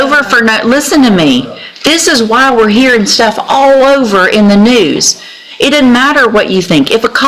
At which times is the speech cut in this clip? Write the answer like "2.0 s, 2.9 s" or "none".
none